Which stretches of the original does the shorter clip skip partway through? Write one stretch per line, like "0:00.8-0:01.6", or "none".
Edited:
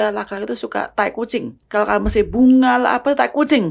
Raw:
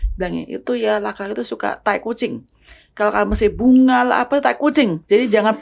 0:02.4-0:02.8